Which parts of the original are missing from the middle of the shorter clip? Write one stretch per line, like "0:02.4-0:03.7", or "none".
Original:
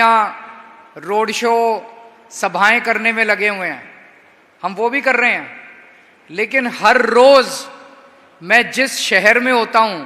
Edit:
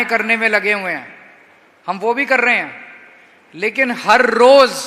none